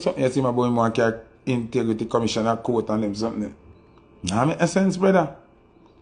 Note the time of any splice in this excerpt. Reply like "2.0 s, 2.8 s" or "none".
none